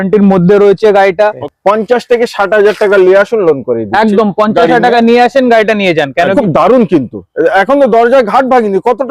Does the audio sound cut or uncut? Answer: cut